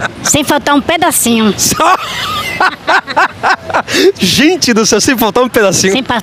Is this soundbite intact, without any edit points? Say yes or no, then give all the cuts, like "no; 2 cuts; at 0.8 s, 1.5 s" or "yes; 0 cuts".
yes; 0 cuts